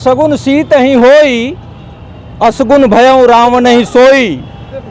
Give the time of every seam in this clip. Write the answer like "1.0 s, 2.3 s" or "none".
none